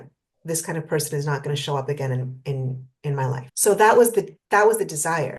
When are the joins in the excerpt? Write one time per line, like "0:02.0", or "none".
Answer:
0:03.5